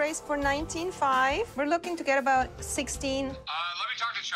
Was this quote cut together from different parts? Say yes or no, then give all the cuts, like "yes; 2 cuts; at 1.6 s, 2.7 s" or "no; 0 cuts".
yes; 1 cut; at 3.4 s